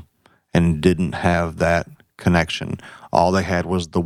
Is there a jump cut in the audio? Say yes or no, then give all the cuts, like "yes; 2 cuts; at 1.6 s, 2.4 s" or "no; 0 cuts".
no; 0 cuts